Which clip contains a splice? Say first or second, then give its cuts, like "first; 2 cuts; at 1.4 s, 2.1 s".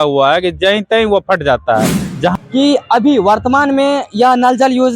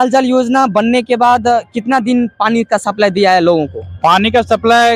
first; 1 cut; at 2.3 s